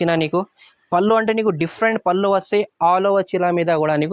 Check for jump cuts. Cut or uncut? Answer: uncut